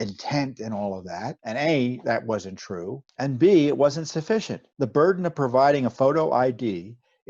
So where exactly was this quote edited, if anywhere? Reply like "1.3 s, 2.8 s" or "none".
1.4 s, 3.0 s, 4.6 s, 5.9 s